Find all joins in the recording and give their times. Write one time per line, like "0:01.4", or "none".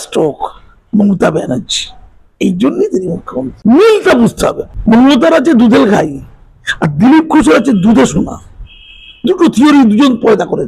0:03.5
0:04.7